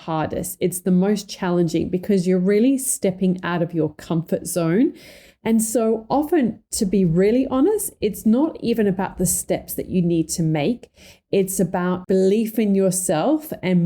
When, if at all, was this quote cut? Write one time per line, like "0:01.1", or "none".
0:12.0